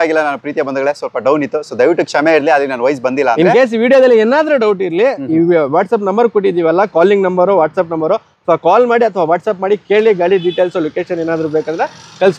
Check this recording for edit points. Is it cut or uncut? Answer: uncut